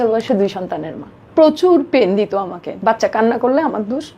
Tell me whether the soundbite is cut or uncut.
cut